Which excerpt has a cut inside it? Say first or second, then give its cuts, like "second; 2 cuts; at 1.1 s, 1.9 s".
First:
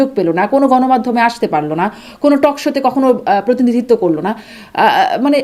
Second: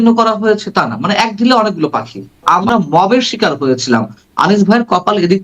second; 1 cut; at 2.4 s